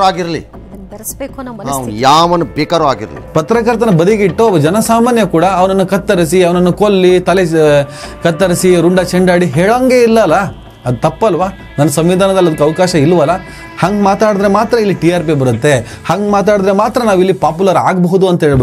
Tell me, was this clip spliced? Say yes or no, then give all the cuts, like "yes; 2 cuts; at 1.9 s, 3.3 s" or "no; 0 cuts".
yes; 2 cuts; at 3.1 s, 13.6 s